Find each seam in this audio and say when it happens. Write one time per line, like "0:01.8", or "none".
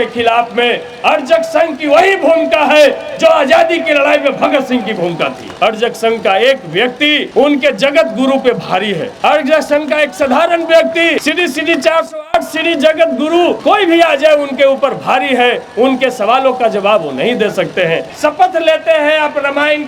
0:05.5
0:07.3
0:09.1
0:11.2
0:13.6
0:18.1